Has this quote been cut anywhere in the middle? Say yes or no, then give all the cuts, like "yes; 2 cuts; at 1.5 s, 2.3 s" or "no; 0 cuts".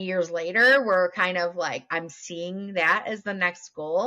no; 0 cuts